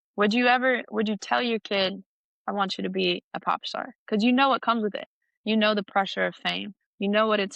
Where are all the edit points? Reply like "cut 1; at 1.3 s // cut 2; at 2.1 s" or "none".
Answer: none